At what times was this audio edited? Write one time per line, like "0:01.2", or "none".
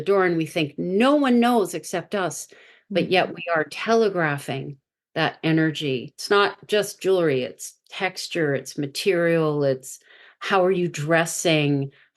0:06.1